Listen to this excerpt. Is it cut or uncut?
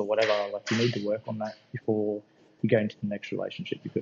uncut